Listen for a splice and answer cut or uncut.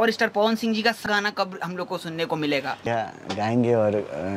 cut